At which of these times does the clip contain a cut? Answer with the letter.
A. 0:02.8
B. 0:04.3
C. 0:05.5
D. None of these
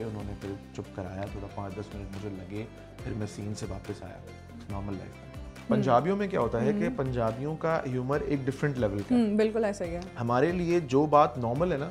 C